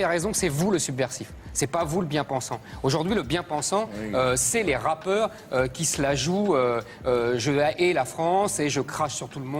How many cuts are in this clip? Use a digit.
0